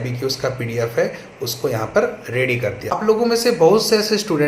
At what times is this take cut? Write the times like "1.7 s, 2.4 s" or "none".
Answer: 3.2 s